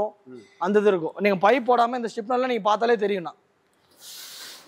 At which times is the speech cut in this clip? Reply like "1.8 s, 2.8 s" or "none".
none